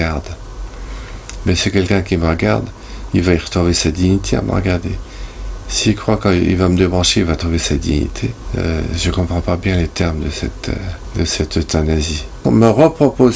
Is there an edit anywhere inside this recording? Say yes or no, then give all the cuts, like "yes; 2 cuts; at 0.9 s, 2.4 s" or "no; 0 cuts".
yes; 3 cuts; at 8.4 s, 11.0 s, 12.4 s